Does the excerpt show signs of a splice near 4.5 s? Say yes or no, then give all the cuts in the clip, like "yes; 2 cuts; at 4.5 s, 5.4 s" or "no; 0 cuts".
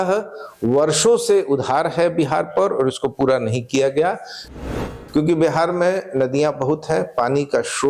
yes; 1 cut; at 4.5 s